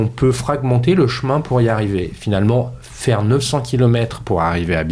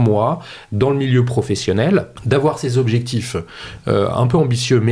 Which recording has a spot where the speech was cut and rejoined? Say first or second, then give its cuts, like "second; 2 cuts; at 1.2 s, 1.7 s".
second; 1 cut; at 2.1 s